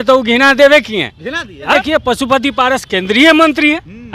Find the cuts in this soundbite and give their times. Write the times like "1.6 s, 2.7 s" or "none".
1.7 s